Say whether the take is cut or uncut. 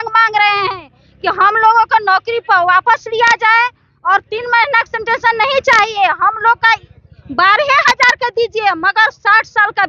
uncut